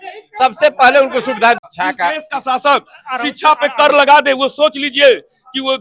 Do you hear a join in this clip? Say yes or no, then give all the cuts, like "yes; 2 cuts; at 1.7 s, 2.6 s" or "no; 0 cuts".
yes; 1 cut; at 1.6 s